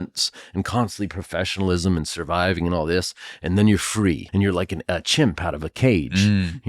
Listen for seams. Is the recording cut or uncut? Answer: cut